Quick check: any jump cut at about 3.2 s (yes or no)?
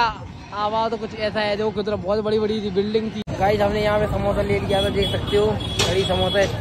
yes